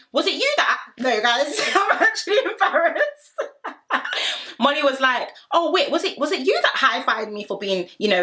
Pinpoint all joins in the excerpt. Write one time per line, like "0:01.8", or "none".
none